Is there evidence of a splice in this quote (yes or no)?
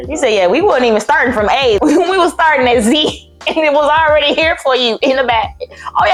no